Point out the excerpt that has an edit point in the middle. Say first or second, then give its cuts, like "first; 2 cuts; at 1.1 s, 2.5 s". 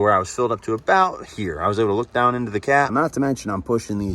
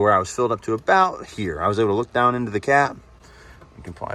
first; 1 cut; at 2.9 s